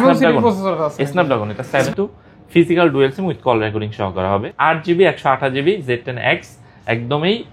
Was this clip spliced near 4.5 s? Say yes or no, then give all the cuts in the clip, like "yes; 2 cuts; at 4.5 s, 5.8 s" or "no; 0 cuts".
yes; 2 cuts; at 1.9 s, 4.5 s